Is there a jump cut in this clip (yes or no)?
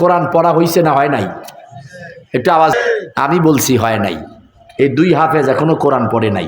yes